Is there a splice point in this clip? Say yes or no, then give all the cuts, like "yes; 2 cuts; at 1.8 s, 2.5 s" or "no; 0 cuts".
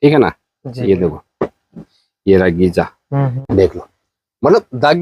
yes; 1 cut; at 3.4 s